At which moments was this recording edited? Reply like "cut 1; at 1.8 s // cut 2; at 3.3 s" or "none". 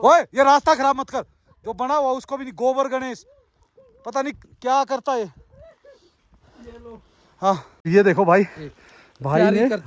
cut 1; at 7.7 s